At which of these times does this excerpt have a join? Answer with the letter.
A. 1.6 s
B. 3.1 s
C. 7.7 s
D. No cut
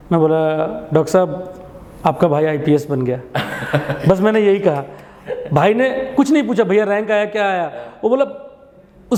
D